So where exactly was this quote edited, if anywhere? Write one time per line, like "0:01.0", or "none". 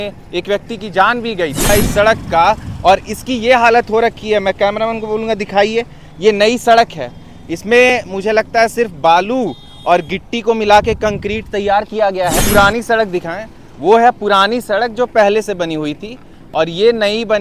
0:01.7
0:12.4